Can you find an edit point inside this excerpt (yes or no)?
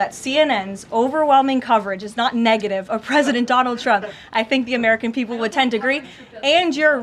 no